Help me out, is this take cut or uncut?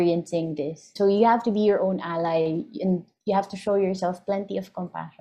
cut